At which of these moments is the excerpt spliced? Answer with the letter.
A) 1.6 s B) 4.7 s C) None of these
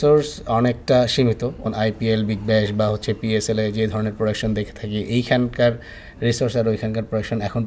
A